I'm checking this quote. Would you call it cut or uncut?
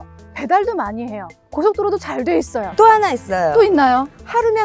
cut